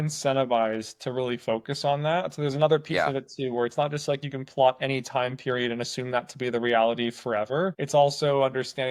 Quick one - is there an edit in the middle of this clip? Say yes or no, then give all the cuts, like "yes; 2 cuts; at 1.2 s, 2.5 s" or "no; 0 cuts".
no; 0 cuts